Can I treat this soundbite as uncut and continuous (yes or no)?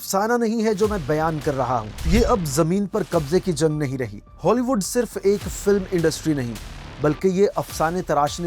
no